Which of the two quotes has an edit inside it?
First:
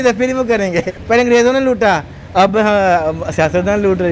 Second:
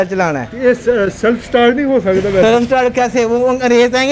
first; 1 cut; at 1.0 s

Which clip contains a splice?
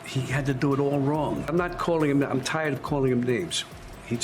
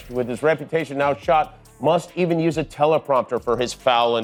first; 1 cut; at 1.4 s

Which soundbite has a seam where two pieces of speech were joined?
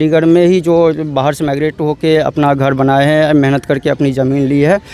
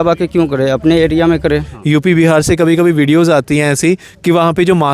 second; 1 cut; at 1.7 s

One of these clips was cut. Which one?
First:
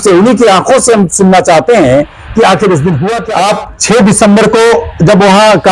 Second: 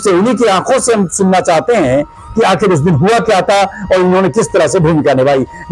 first; 1 cut; at 3.1 s

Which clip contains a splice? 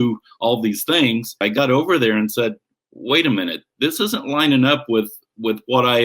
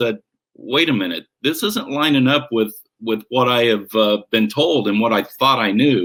first; 1 cut; at 1.4 s

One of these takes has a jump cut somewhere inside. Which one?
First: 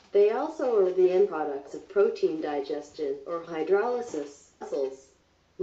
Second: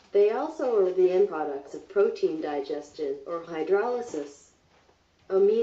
second; 1 cut; at 4.7 s

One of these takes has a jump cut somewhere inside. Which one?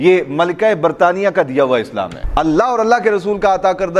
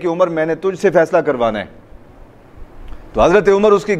first; 1 cut; at 2.2 s

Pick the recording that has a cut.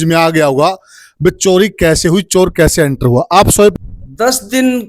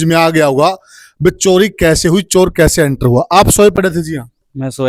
first; 1 cut; at 3.8 s

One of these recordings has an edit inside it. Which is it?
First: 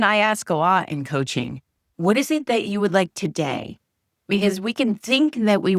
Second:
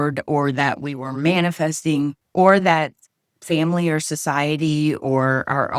second; 1 cut; at 2.2 s

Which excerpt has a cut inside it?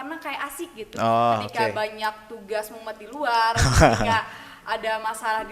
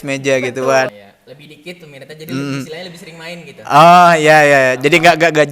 second; 1 cut; at 0.9 s

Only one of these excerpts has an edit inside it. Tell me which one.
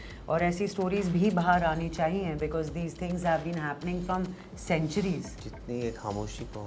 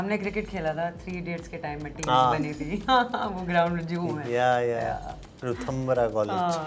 first; 1 cut; at 5.4 s

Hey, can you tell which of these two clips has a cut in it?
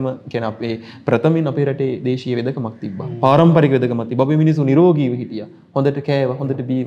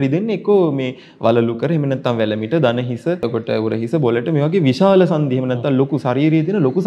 second; 1 cut; at 3.2 s

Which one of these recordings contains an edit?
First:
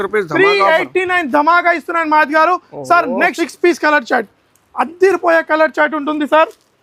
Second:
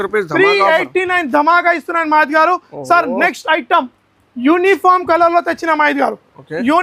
first; 1 cut; at 3.3 s

